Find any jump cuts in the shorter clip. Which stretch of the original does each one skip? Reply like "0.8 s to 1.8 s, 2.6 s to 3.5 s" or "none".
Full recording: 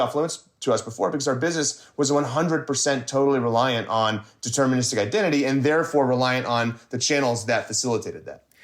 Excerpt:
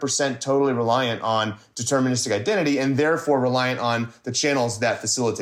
none